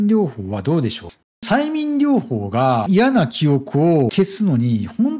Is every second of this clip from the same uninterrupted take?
no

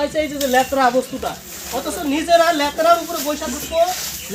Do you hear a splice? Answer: no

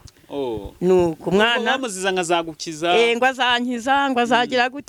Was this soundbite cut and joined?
no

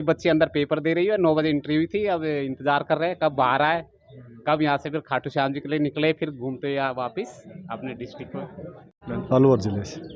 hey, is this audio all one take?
no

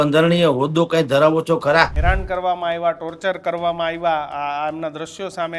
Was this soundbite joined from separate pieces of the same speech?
yes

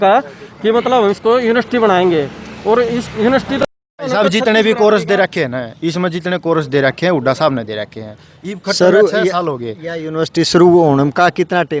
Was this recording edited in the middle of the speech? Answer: no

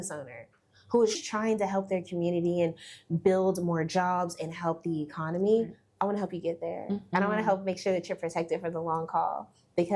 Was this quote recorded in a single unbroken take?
no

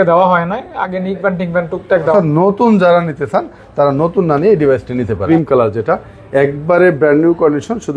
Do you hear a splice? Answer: yes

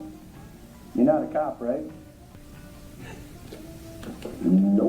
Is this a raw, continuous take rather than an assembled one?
no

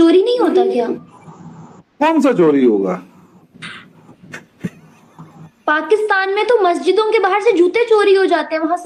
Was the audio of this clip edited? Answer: no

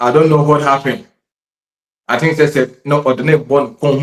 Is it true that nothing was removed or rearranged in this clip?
yes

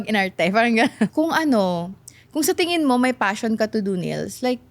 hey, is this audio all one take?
no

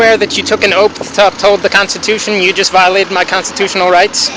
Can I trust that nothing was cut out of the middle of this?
yes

